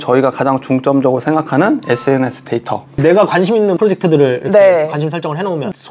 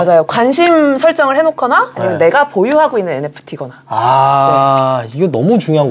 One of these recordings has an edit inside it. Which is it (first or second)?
first